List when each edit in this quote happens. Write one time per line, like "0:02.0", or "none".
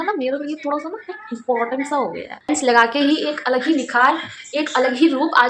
0:02.3